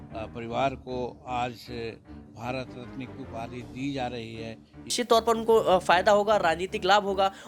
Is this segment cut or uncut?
cut